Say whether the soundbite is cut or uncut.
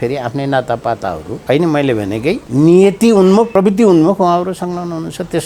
cut